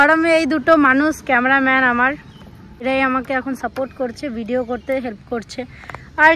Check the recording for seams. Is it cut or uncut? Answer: cut